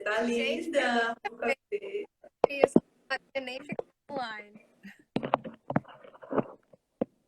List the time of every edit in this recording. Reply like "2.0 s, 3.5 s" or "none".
4.3 s